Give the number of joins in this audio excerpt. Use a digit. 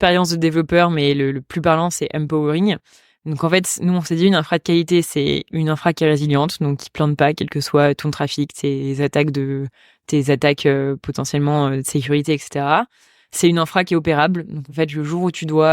0